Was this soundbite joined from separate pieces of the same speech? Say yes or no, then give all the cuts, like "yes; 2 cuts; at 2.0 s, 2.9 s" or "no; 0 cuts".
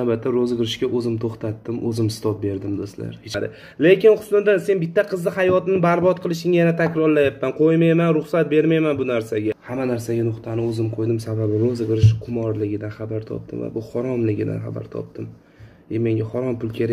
yes; 2 cuts; at 3.4 s, 9.6 s